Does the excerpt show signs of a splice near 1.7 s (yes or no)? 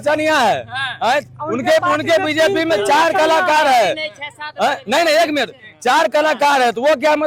no